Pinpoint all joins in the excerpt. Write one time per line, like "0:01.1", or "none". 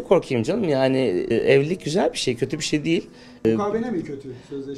0:01.3
0:03.4